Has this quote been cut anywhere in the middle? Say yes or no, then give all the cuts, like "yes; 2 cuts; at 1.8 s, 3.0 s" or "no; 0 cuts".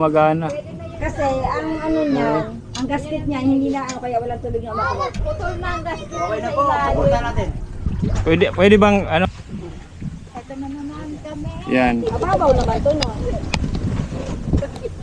yes; 1 cut; at 9.3 s